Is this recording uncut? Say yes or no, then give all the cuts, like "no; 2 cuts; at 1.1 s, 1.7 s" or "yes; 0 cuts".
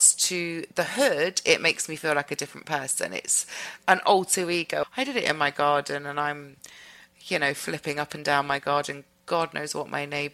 no; 1 cut; at 4.8 s